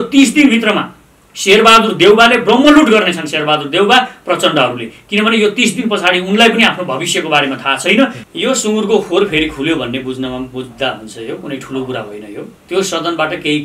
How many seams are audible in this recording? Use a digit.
2